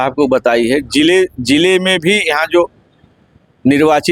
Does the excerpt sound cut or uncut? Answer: uncut